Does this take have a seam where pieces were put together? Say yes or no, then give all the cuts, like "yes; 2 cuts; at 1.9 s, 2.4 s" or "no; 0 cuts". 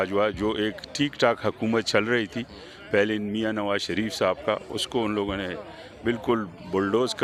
no; 0 cuts